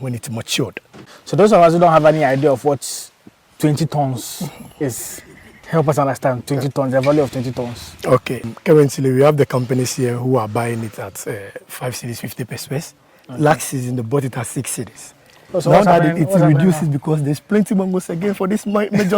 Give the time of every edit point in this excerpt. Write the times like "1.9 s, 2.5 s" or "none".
1.1 s, 8.5 s